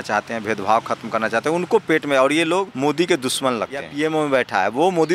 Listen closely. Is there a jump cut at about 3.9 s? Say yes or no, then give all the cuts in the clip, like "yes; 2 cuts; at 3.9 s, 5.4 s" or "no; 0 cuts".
yes; 2 cuts; at 2.7 s, 3.9 s